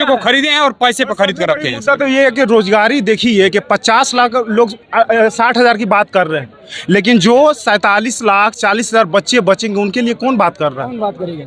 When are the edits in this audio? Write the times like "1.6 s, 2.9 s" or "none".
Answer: none